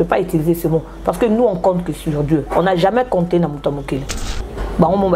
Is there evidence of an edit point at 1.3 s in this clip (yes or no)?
no